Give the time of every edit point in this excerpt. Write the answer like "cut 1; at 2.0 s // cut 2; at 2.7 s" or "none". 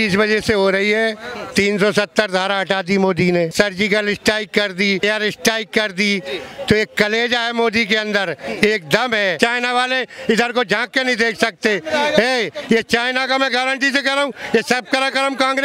cut 1; at 3.5 s // cut 2; at 5.0 s // cut 3; at 9.3 s